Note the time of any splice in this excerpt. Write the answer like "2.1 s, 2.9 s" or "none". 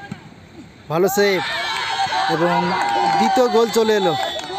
none